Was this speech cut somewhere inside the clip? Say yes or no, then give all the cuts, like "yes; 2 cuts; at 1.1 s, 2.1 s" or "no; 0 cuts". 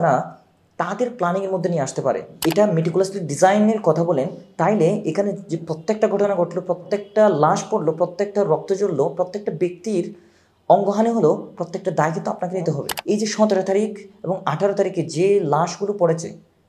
yes; 2 cuts; at 2.3 s, 12.9 s